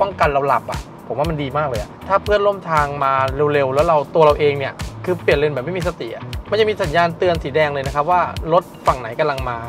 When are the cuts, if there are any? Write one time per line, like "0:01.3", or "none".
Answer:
0:00.9
0:01.9